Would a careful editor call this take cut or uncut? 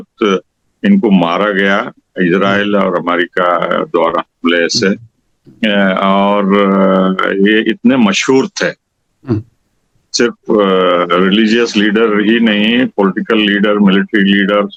uncut